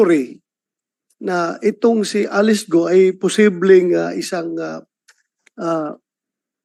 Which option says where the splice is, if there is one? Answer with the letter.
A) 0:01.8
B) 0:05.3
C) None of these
C